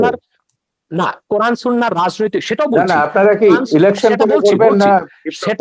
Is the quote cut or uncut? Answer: uncut